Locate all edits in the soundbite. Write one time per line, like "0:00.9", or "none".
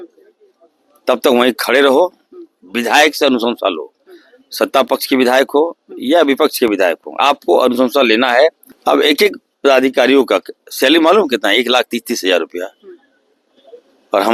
0:08.7